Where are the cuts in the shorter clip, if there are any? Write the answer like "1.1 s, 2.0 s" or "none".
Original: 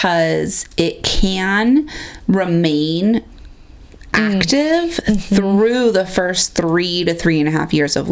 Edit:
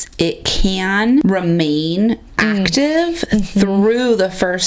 1.2 s, 2.3 s